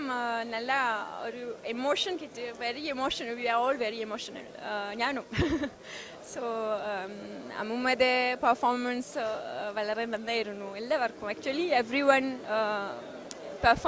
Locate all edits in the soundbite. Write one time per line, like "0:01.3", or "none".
none

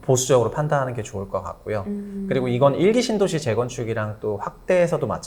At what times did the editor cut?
none

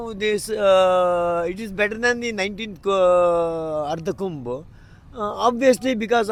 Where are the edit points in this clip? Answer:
none

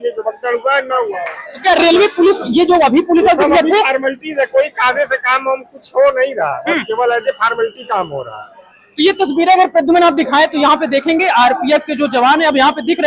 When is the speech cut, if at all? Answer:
none

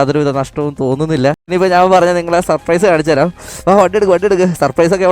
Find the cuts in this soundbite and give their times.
0:01.4

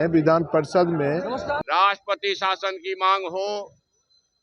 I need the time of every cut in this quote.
0:01.6

